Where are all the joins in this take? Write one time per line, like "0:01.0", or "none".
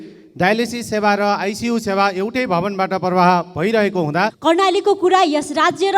0:04.4